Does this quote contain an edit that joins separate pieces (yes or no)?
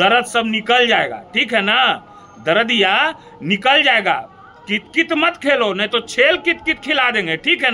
no